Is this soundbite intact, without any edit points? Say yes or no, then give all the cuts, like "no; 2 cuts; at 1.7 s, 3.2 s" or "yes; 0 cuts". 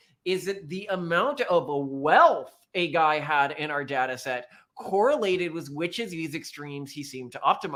yes; 0 cuts